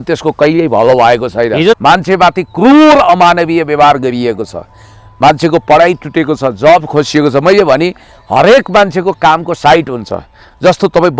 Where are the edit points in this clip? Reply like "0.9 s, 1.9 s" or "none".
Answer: 1.8 s